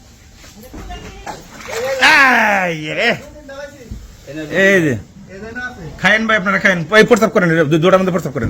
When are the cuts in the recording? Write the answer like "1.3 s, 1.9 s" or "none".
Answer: 1.3 s

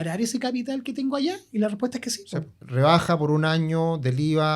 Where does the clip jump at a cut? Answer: 2.6 s

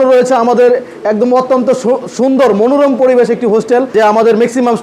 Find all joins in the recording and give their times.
3.9 s

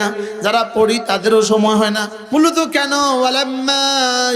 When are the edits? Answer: 2.1 s

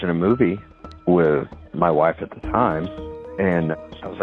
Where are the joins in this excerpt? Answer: none

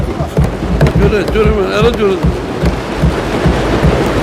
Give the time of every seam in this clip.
0.9 s

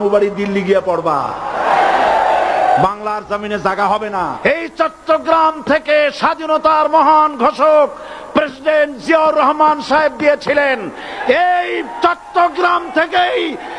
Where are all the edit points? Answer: 4.4 s

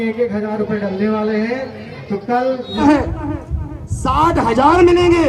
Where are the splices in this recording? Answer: 2.7 s

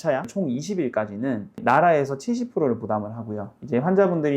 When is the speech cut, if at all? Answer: none

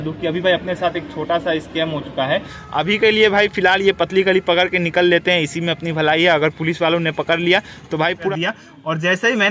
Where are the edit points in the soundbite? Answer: 2.6 s, 8.3 s

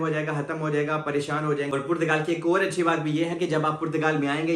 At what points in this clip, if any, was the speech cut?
1.7 s

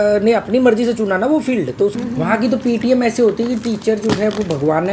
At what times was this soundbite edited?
2.0 s

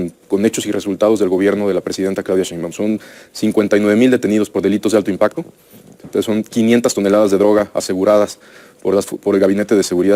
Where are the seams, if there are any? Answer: none

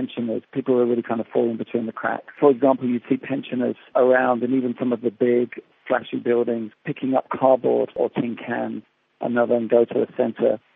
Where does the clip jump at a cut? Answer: 2.3 s, 3.9 s, 6.7 s, 8.0 s

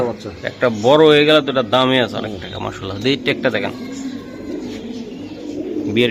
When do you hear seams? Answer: none

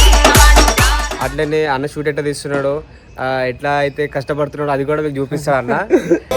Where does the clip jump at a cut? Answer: 1.0 s

